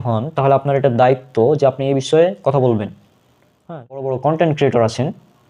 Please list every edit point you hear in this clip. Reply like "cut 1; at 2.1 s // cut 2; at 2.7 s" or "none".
cut 1; at 4.0 s

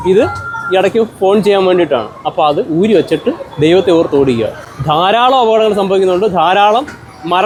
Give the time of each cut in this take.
none

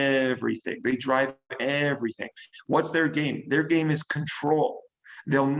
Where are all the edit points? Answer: none

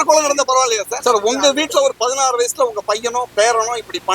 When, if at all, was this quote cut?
cut 1; at 0.9 s

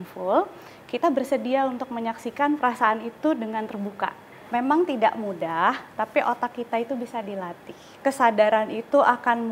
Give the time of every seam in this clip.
cut 1; at 4.4 s // cut 2; at 8.0 s

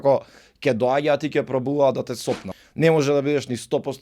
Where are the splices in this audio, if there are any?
cut 1; at 2.6 s

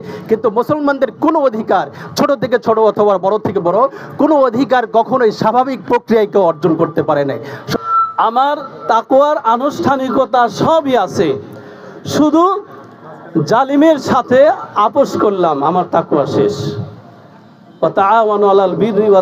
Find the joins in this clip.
cut 1; at 7.8 s

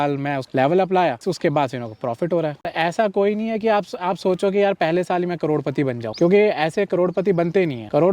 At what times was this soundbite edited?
cut 1; at 1.2 s // cut 2; at 2.7 s

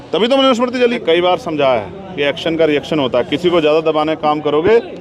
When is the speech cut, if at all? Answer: cut 1; at 1.0 s

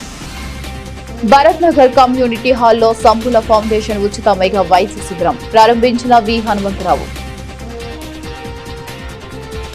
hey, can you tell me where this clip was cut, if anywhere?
cut 1; at 1.2 s // cut 2; at 7.1 s // cut 3; at 8.9 s

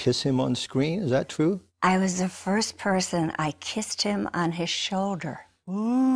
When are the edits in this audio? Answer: none

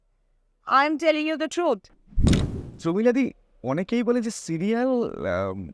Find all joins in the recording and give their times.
cut 1; at 2.4 s

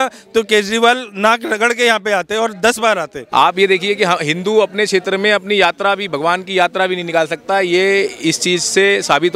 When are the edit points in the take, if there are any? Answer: cut 1; at 3.2 s

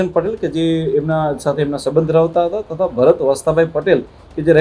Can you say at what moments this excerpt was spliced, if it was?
none

